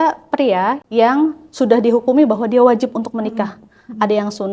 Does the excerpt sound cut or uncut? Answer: uncut